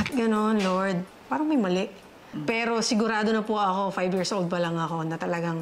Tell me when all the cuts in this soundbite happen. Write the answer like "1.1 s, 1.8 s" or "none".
1.1 s, 2.3 s